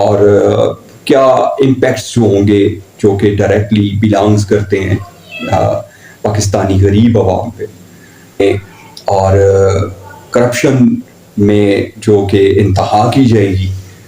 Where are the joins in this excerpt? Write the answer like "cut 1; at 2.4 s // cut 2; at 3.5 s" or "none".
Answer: cut 1; at 8.4 s